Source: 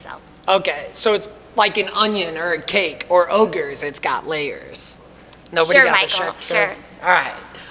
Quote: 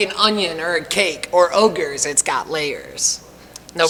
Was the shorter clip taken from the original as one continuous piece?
yes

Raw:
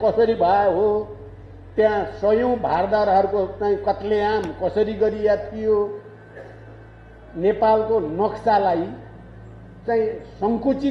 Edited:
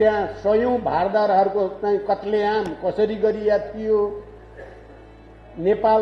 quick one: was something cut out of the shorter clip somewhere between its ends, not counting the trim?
no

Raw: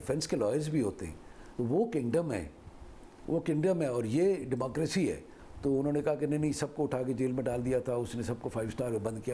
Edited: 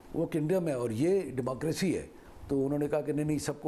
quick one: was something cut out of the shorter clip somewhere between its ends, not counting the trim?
no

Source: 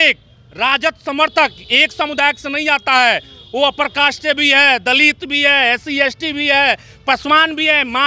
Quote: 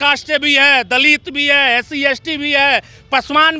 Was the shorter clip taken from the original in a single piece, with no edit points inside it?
yes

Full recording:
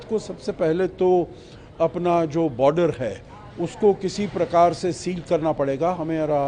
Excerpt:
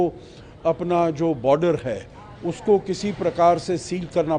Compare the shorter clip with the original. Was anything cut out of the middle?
no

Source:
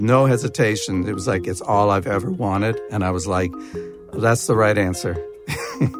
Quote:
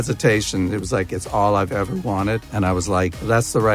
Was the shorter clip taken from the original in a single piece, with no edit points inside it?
no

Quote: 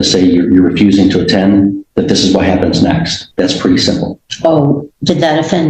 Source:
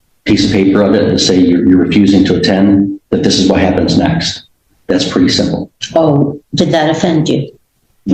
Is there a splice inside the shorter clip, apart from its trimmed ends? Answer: yes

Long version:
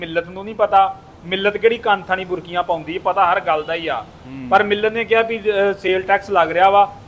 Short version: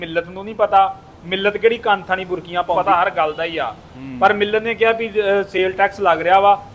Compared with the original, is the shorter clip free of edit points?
no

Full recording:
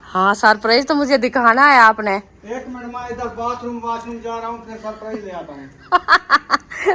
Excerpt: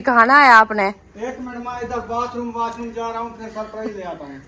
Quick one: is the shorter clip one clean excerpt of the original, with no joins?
yes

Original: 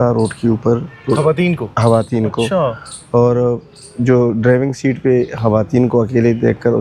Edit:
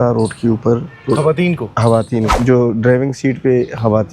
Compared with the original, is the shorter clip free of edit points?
no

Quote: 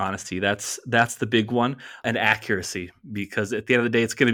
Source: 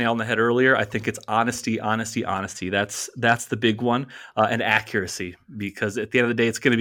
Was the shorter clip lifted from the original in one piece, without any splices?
no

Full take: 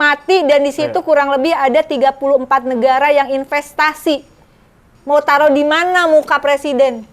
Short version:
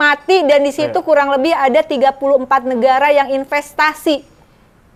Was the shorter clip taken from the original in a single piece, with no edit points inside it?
yes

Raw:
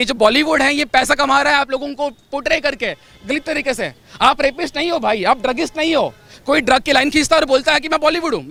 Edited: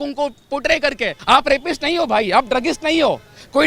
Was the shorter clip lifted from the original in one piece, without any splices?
no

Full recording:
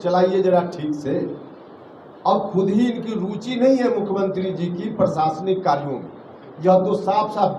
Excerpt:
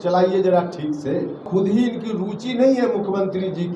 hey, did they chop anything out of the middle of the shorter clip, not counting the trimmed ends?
yes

